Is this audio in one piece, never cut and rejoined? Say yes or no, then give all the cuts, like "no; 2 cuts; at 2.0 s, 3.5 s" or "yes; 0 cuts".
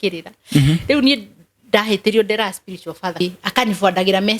no; 1 cut; at 3.2 s